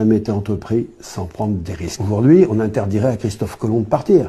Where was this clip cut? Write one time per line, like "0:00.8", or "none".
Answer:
0:01.9